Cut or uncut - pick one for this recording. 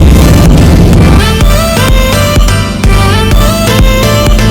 cut